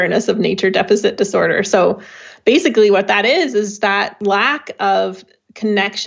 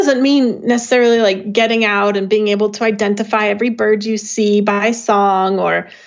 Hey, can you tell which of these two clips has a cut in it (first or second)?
first